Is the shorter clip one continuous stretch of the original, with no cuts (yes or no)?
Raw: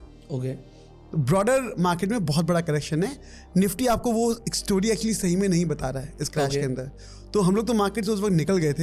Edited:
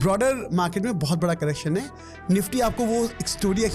yes